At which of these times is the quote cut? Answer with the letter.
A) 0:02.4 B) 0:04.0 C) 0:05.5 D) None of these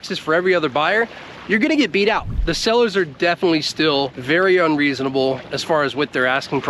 A